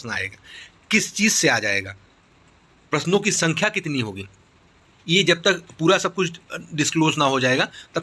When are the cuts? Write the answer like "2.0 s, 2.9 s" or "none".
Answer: none

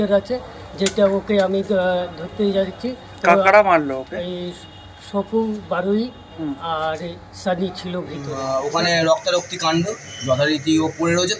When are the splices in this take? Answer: 8.3 s

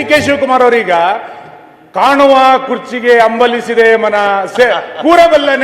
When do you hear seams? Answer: none

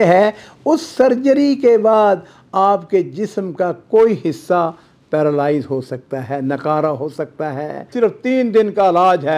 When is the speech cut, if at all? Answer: 7.9 s

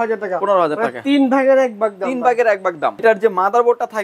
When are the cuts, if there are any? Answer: 3.0 s

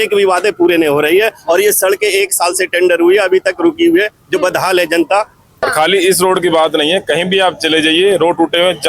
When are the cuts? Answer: 5.6 s

